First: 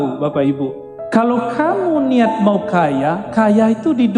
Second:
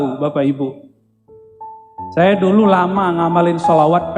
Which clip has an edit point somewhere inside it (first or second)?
first